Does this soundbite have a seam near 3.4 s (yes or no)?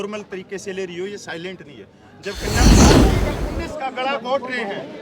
yes